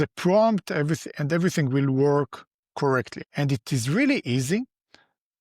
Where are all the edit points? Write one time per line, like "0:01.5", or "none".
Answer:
0:03.2